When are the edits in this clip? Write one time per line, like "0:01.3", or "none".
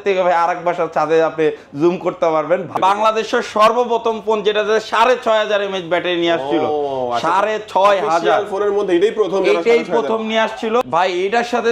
0:02.7
0:10.8